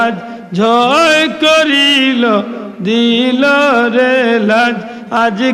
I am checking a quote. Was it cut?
no; 0 cuts

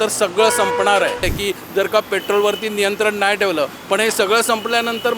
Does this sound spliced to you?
yes; 1 cut; at 1.3 s

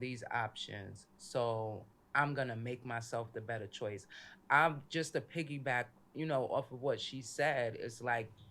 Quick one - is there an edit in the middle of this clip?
no; 0 cuts

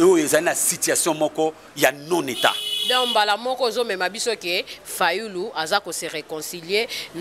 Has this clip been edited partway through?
no; 0 cuts

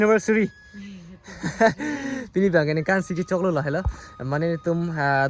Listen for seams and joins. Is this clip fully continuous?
yes; 0 cuts

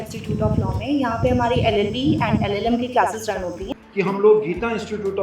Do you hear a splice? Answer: yes; 1 cut; at 3.6 s

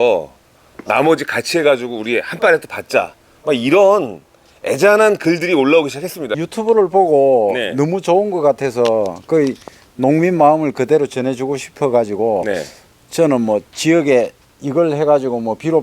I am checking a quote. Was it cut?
yes; 1 cut; at 6.3 s

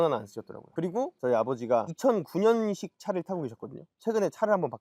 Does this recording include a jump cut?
yes; 1 cut; at 3.9 s

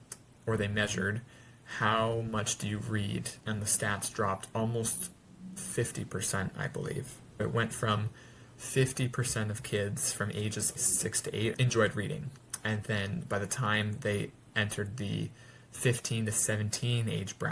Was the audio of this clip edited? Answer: yes; 3 cuts; at 3.3 s, 7.4 s, 10.9 s

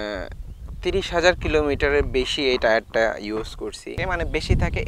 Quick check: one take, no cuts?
no; 1 cut; at 4.0 s

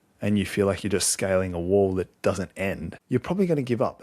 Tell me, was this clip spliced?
yes; 1 cut; at 2.9 s

